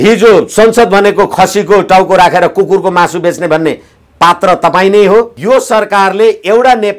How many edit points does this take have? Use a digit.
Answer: 1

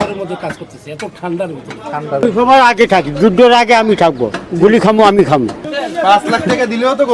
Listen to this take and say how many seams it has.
2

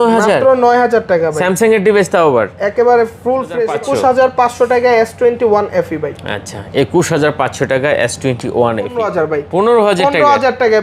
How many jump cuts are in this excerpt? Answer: 2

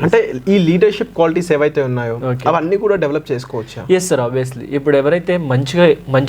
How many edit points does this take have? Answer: 0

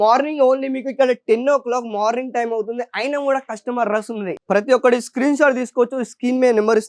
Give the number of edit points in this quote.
1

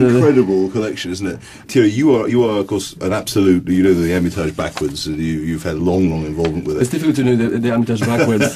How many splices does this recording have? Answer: 0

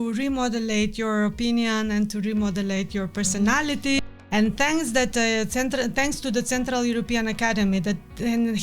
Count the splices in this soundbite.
1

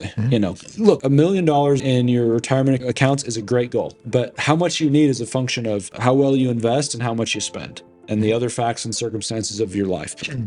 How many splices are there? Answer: 2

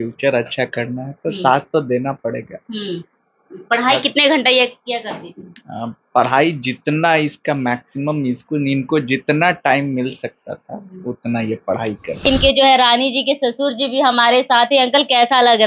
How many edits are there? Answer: 1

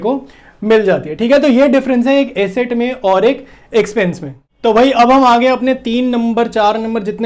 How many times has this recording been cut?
0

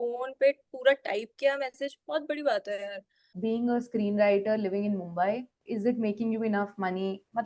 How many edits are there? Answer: 2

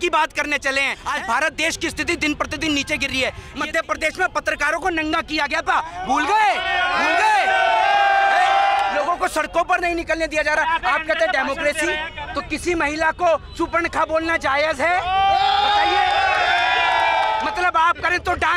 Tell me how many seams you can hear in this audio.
5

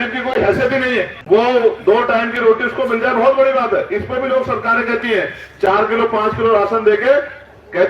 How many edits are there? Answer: 1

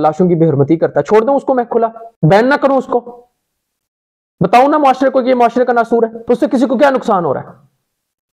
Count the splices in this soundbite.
0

